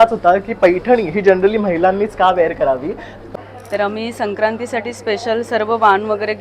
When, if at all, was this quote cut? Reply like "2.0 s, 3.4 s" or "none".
3.3 s